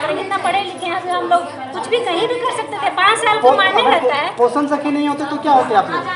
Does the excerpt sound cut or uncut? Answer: uncut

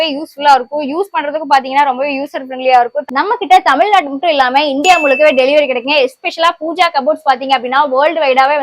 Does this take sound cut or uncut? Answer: cut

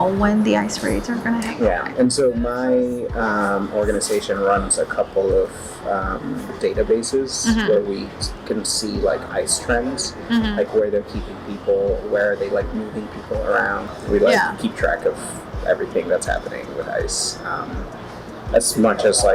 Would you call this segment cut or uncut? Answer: cut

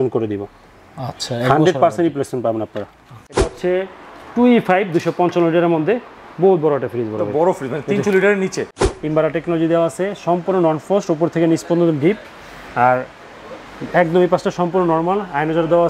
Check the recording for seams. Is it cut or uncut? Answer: cut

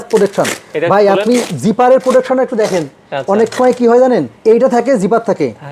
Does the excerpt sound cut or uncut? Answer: uncut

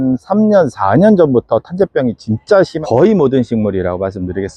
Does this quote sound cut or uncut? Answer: cut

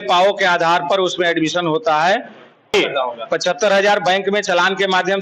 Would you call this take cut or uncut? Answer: cut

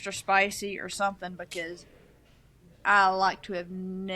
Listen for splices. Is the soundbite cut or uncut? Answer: uncut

